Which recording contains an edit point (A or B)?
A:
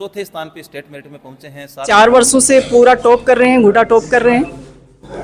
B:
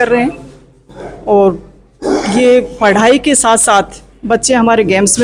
A